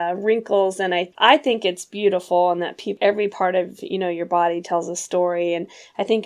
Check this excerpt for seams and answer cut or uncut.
cut